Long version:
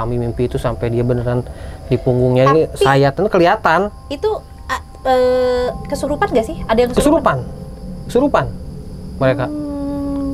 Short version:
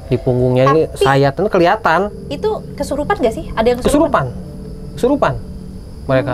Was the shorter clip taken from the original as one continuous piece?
no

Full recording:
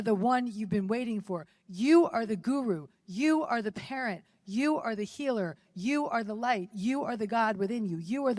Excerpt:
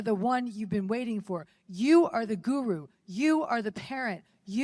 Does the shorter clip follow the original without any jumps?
yes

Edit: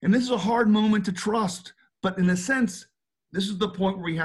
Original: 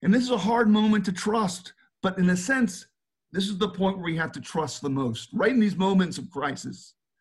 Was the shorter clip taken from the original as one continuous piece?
yes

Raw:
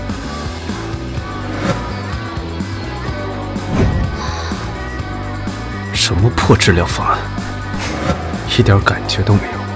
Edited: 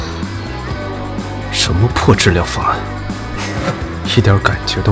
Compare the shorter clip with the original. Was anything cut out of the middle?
yes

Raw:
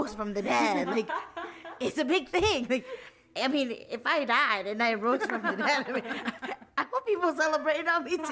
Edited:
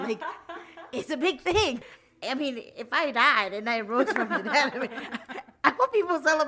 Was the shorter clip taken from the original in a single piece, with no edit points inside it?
no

